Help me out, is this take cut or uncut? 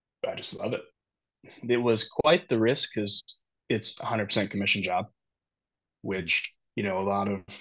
cut